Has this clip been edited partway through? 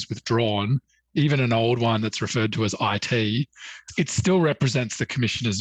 no; 0 cuts

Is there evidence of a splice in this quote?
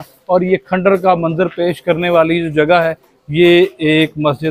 no; 0 cuts

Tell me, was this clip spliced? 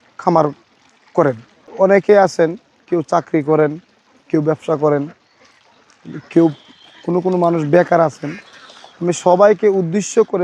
yes; 1 cut; at 1.7 s

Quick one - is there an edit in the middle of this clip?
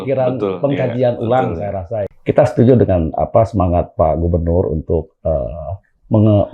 yes; 1 cut; at 2.1 s

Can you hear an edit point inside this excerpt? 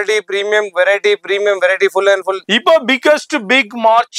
yes; 1 cut; at 2.4 s

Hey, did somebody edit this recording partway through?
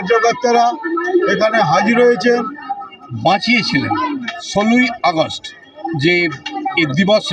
yes; 1 cut; at 2.3 s

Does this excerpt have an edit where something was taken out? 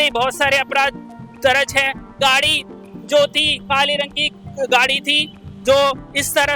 yes; 1 cut; at 2.2 s

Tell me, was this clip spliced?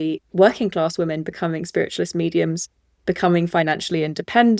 no; 0 cuts

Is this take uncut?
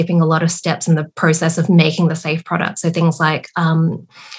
yes; 0 cuts

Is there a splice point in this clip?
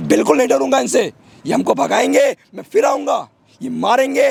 no; 0 cuts

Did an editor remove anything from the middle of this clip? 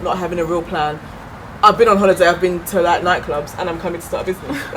no; 0 cuts

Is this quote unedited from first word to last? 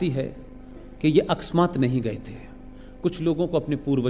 yes; 0 cuts

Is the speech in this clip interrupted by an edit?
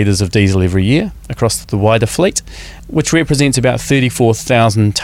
yes; 2 cuts; at 1.6 s, 2.8 s

